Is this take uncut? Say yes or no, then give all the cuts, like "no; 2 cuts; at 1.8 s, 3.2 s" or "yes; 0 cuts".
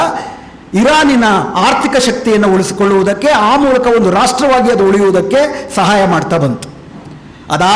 yes; 0 cuts